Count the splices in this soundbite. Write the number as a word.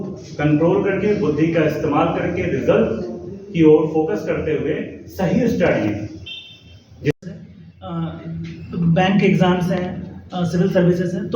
one